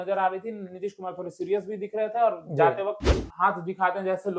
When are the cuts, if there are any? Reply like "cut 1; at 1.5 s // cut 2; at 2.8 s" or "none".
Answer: none